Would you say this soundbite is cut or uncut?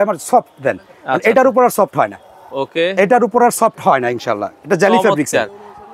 uncut